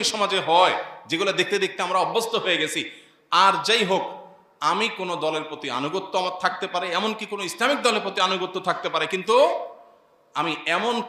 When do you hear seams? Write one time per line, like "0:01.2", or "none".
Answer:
none